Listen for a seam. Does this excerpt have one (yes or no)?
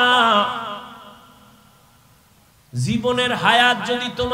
no